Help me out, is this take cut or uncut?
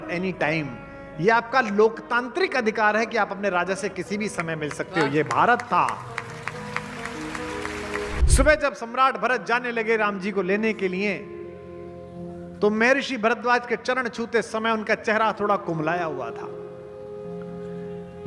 cut